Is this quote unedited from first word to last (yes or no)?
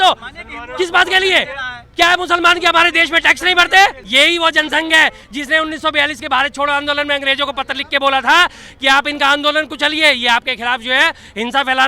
no